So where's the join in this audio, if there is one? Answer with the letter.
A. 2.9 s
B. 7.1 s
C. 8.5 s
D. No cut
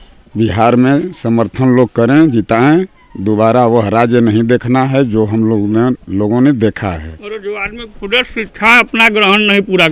B